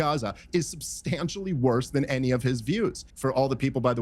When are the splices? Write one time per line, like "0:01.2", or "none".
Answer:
0:03.1